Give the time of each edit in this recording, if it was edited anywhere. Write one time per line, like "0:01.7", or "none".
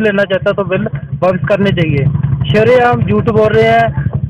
none